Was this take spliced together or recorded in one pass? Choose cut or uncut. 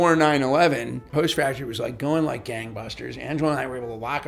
cut